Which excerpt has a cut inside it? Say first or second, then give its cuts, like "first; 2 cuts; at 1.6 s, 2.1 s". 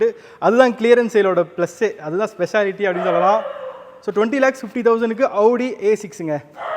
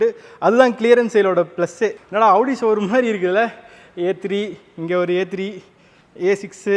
second; 1 cut; at 2.0 s